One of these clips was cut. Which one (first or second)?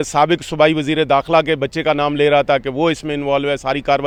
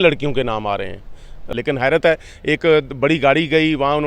second